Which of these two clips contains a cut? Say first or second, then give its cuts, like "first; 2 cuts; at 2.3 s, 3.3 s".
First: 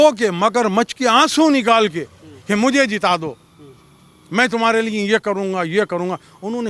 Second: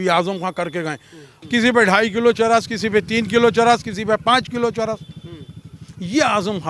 second; 1 cut; at 1.3 s